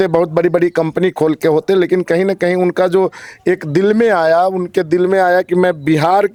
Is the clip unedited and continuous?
yes; 0 cuts

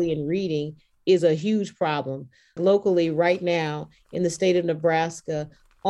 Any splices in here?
yes; 1 cut; at 2.6 s

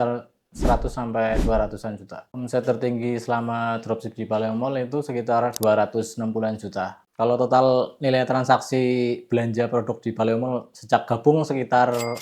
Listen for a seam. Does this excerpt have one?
no; 0 cuts

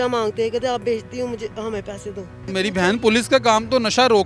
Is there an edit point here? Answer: yes; 1 cut; at 2.4 s

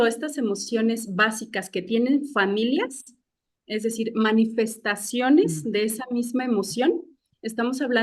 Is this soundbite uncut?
yes; 0 cuts

